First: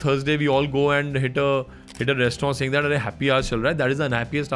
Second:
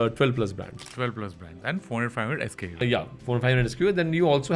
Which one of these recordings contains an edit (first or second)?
second